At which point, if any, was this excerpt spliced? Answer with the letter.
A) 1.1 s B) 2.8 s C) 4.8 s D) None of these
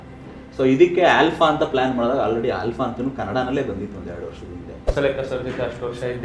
C